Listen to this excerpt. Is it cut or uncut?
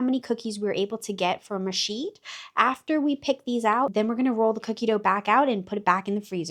uncut